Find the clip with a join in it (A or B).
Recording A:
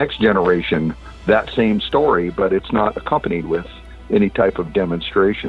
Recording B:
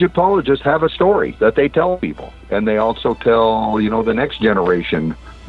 B